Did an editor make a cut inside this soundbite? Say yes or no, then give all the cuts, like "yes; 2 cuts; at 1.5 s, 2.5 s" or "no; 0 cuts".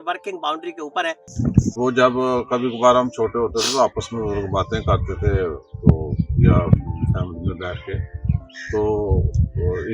yes; 1 cut; at 1.4 s